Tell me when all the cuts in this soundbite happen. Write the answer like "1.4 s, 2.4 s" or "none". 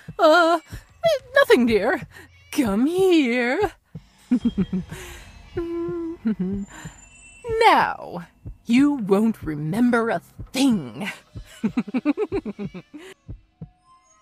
13.2 s

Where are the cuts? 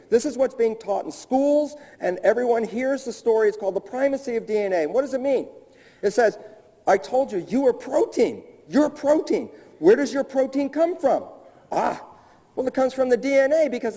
5.9 s

